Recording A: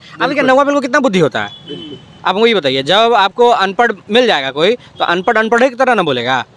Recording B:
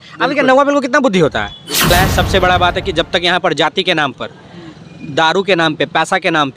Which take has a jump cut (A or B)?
B